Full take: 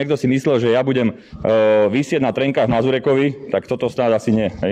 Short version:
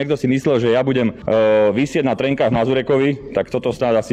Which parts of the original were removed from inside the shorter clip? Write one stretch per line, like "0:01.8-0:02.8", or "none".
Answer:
0:01.2-0:01.3